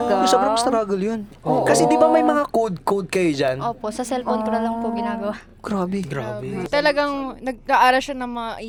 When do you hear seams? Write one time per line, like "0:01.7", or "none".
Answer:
none